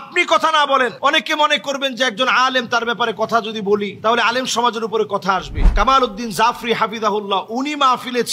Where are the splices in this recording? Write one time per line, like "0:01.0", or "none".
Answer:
0:05.6